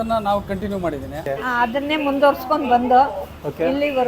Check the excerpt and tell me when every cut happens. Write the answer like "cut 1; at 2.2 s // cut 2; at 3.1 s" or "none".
cut 1; at 1.2 s